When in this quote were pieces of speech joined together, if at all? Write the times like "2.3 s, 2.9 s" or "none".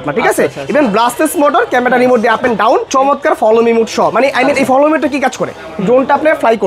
2.9 s